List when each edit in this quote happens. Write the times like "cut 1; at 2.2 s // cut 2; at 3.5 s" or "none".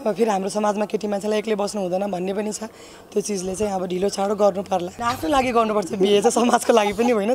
cut 1; at 4.9 s